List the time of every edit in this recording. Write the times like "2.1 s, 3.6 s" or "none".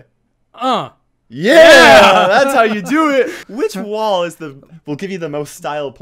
3.4 s